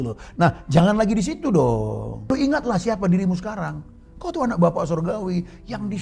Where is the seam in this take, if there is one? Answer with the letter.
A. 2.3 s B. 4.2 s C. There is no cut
A